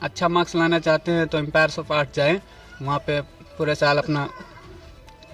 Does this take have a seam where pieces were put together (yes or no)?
no